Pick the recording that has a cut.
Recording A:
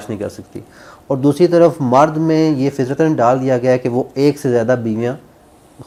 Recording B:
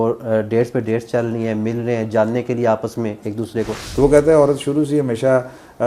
B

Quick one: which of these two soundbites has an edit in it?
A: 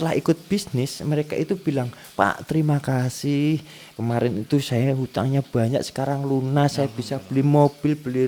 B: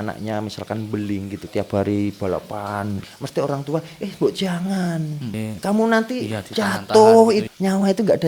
B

